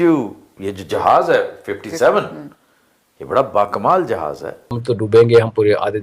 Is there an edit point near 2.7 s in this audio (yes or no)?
no